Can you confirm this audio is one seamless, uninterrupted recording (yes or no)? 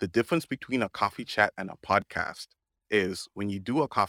yes